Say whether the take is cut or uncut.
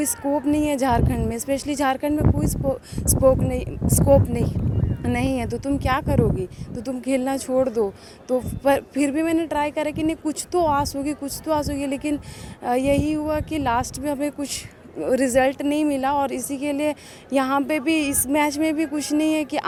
uncut